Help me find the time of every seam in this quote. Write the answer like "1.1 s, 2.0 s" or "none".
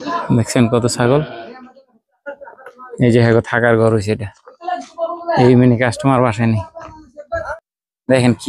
7.5 s